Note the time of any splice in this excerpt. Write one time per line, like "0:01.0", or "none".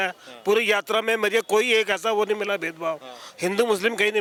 none